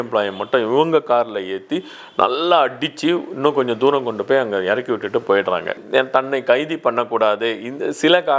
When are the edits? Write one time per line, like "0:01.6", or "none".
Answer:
0:05.8